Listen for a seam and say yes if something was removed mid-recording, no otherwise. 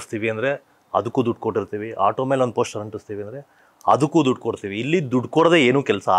no